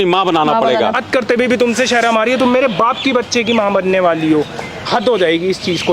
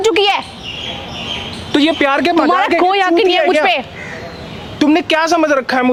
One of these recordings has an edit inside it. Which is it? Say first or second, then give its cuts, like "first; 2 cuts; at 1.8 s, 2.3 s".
first; 2 cuts; at 1.0 s, 4.8 s